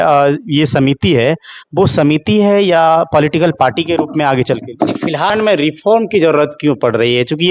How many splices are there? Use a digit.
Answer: 1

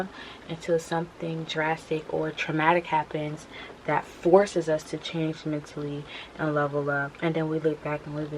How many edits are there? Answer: 1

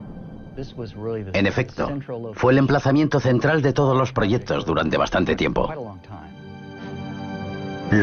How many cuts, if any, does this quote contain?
0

